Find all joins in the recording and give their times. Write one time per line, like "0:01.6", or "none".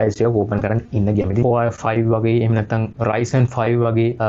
0:01.5